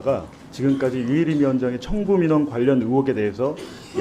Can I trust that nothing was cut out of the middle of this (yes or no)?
yes